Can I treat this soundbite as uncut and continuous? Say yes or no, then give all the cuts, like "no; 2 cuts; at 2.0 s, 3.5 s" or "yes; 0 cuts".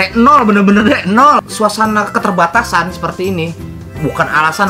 no; 1 cut; at 1.5 s